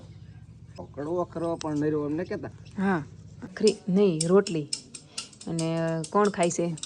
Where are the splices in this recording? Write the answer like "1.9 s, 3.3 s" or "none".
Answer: 0.9 s, 3.5 s